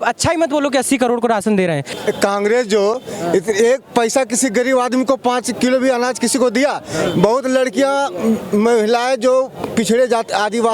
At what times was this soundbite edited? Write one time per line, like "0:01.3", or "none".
0:01.9